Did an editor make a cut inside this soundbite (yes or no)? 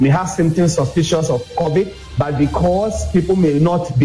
yes